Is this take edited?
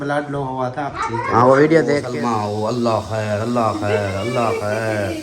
yes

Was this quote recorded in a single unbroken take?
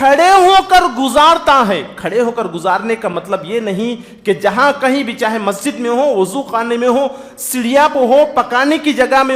yes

